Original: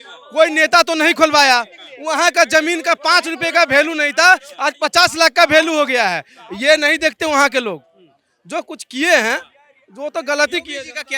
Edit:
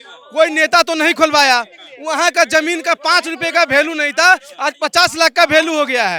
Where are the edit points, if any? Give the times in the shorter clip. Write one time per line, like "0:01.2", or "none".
none